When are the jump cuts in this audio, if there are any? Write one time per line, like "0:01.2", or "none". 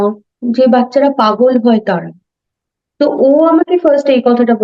none